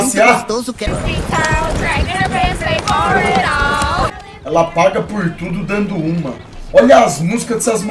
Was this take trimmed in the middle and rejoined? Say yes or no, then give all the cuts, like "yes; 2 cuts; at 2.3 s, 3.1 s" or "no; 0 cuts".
yes; 2 cuts; at 0.9 s, 4.1 s